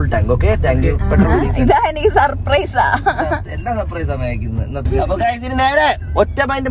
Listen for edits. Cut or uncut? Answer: uncut